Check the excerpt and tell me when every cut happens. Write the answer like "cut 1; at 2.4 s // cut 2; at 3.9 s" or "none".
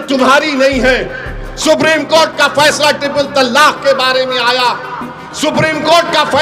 none